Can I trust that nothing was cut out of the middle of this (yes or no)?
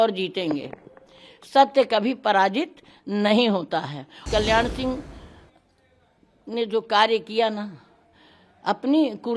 no